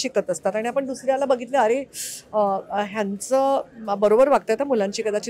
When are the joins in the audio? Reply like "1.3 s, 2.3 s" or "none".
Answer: none